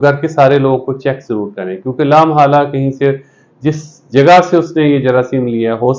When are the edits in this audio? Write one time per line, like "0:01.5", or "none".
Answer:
none